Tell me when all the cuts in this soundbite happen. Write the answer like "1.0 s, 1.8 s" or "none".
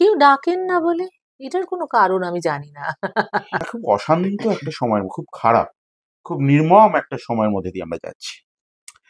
3.6 s